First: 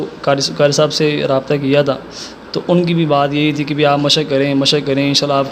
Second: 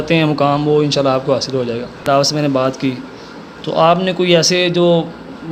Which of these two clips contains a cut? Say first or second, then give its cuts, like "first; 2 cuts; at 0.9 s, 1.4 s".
second; 1 cut; at 1.9 s